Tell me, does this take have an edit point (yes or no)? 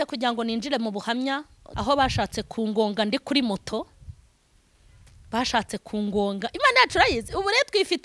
yes